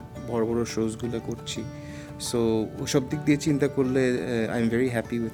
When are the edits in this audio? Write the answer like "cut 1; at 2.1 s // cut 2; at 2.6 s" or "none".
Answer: none